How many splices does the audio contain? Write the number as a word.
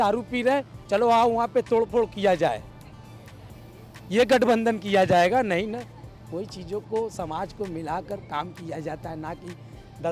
zero